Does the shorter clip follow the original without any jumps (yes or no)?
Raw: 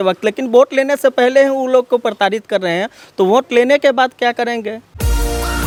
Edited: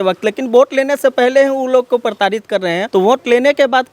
no